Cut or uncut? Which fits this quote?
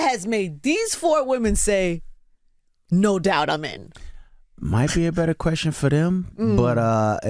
uncut